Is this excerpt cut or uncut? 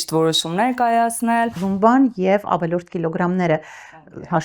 cut